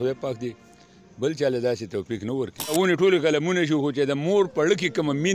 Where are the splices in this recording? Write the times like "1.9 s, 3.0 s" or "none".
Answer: 2.7 s